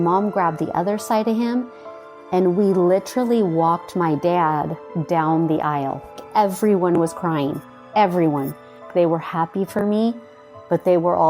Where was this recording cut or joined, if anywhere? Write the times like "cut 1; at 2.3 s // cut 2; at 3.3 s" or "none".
cut 1; at 6.2 s // cut 2; at 8.9 s